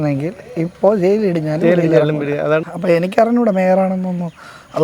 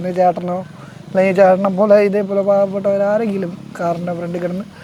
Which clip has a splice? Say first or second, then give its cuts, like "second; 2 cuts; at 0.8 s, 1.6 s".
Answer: first; 1 cut; at 2.6 s